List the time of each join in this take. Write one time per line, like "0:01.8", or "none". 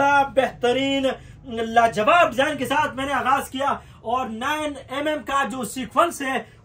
none

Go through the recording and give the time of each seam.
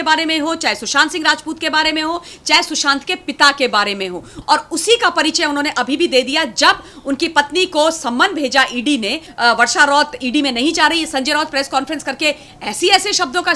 0:04.3
0:09.2

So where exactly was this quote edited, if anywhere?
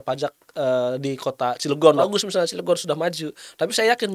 0:02.1

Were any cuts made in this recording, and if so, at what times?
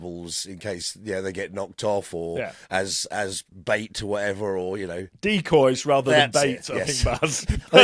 0:03.5
0:05.5

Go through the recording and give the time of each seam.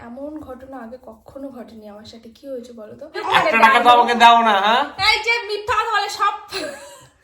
0:03.2

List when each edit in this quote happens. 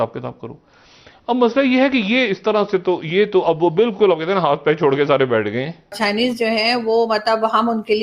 0:05.9

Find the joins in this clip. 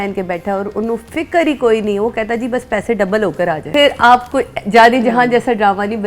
0:03.7

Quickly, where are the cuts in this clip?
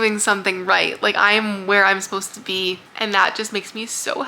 0:02.9

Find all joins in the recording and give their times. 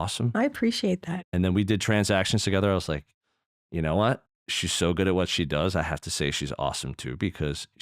0:01.0

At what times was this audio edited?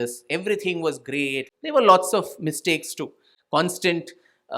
0:01.5
0:03.3

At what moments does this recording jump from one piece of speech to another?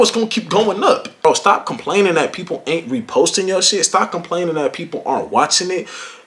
0:01.2

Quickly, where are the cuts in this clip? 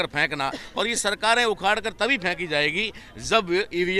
none

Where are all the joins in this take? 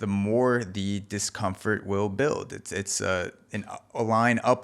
none

